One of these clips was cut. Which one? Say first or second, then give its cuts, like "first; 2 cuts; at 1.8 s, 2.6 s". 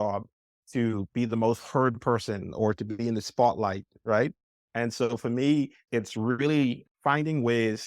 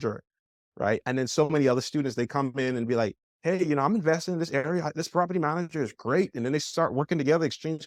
first; 2 cuts; at 5.8 s, 6.8 s